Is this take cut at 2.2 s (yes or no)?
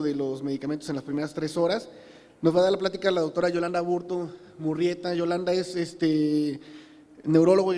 yes